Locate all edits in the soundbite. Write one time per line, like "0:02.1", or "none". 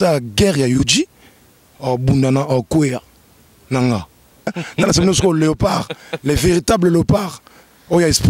0:04.5